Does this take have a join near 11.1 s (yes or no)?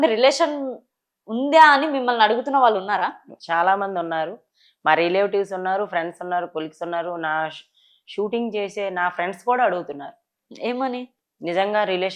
no